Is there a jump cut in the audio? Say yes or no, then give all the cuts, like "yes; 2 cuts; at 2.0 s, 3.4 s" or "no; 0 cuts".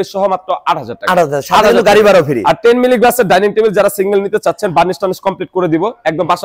no; 0 cuts